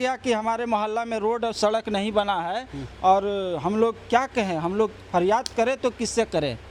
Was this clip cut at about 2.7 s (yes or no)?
no